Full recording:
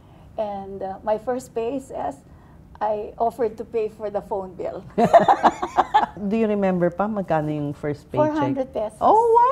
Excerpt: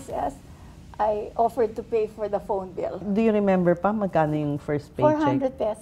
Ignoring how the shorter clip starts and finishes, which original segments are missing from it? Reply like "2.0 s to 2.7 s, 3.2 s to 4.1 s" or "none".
4.8 s to 6.2 s